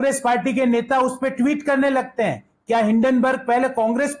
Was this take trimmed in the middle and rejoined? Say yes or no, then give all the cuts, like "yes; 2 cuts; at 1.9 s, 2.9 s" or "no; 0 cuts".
no; 0 cuts